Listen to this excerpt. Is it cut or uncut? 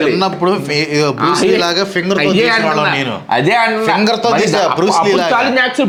uncut